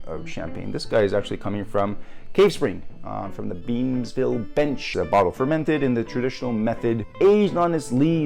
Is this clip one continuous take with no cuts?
no; 2 cuts; at 4.9 s, 7.1 s

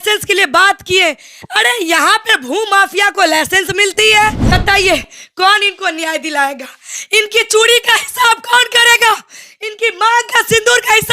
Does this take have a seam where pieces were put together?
yes; 1 cut; at 4.5 s

